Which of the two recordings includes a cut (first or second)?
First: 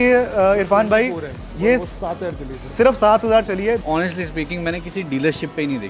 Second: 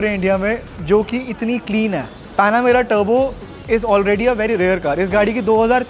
first